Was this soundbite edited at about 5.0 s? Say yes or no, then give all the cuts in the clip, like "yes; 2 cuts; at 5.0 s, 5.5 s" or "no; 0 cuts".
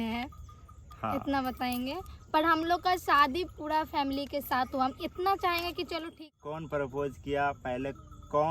no; 1 cut; at 6.2 s